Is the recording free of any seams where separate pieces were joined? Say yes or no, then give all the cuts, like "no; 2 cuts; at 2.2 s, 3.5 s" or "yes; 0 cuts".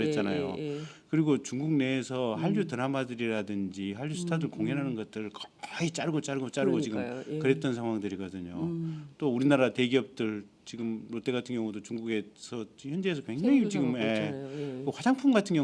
no; 1 cut; at 8.1 s